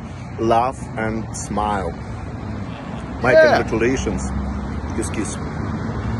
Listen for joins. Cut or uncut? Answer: uncut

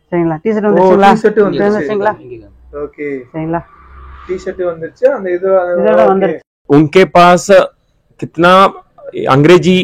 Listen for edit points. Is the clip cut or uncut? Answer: cut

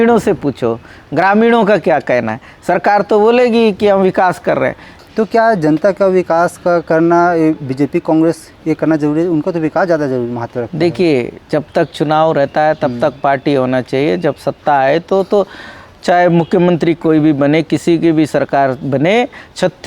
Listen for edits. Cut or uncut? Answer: cut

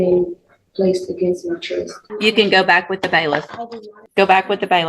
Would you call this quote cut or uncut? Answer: cut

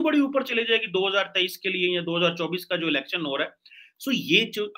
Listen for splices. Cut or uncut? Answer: uncut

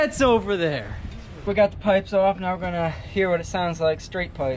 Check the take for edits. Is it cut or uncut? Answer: cut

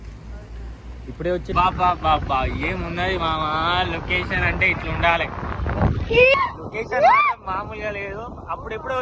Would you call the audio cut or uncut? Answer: cut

